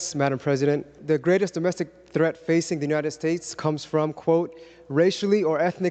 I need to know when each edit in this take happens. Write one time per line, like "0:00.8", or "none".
0:00.9